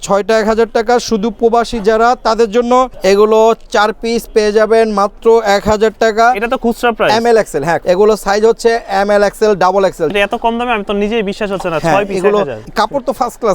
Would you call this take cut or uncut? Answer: cut